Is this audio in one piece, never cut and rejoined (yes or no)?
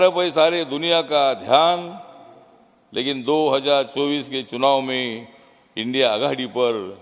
yes